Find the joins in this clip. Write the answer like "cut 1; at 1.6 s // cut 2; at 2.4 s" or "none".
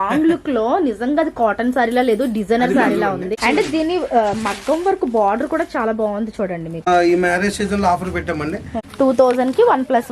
cut 1; at 3.3 s // cut 2; at 6.9 s // cut 3; at 8.8 s